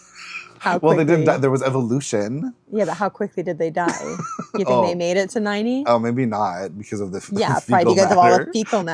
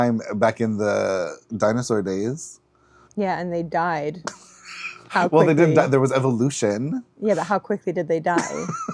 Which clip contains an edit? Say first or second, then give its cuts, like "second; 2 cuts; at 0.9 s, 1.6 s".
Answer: second; 1 cut; at 1.4 s